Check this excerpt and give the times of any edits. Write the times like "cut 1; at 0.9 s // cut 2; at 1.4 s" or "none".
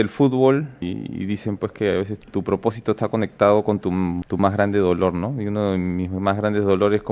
cut 1; at 0.8 s // cut 2; at 2.1 s // cut 3; at 4.2 s